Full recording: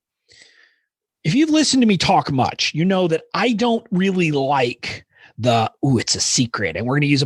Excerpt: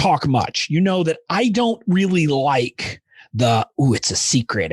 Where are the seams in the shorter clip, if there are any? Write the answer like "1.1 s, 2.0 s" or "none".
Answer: none